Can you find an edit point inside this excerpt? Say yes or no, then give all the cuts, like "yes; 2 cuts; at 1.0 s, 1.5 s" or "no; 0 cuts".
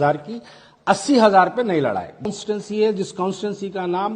yes; 1 cut; at 2.2 s